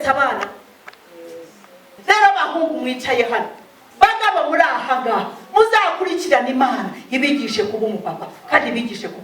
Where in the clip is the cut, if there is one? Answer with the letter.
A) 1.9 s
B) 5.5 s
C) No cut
A